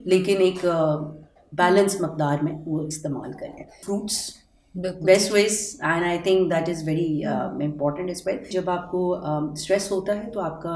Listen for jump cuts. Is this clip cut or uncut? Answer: cut